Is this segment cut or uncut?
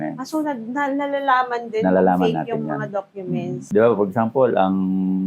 cut